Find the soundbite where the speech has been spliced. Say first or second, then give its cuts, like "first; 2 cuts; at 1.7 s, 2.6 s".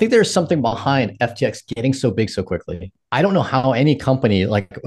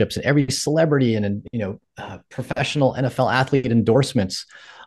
first; 1 cut; at 3.0 s